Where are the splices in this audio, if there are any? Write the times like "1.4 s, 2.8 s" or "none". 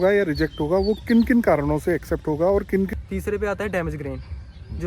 2.9 s